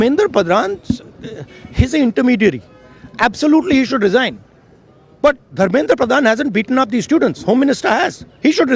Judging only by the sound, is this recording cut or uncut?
uncut